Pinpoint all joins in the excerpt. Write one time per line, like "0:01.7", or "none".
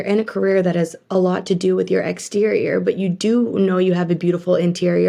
none